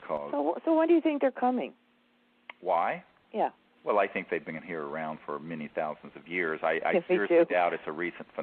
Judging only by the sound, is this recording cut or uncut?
cut